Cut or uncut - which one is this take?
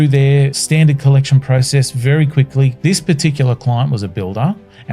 cut